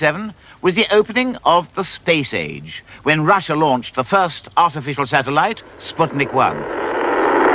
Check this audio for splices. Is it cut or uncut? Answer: uncut